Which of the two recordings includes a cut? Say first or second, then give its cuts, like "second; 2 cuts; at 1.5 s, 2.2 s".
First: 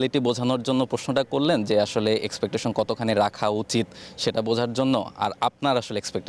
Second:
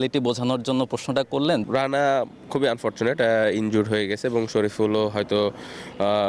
second; 1 cut; at 1.6 s